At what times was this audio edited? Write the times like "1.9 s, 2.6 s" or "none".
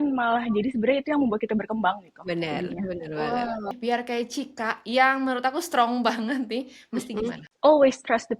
3.7 s, 7.5 s